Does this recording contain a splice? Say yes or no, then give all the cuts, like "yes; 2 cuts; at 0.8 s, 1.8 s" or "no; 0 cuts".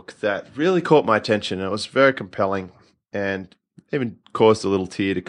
no; 0 cuts